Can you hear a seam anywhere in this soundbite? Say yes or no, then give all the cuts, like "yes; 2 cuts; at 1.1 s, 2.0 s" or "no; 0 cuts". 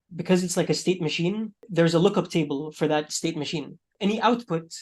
yes; 2 cuts; at 1.6 s, 3.8 s